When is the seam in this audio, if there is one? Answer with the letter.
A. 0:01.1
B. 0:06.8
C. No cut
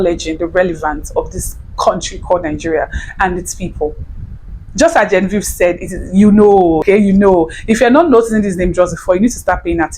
B